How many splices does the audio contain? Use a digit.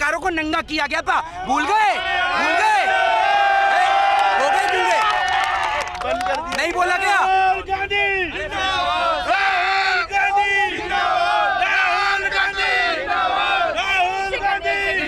0